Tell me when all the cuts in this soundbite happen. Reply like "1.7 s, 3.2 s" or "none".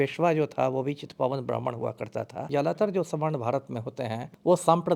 2.5 s